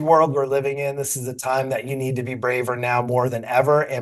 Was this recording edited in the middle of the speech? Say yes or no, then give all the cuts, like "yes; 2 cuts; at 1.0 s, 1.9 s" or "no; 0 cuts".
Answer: no; 0 cuts